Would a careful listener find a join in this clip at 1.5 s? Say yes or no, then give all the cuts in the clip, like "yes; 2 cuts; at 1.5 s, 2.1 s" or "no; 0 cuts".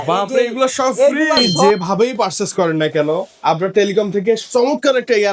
yes; 1 cut; at 1.5 s